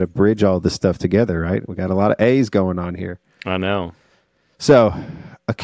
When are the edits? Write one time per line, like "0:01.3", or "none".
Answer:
none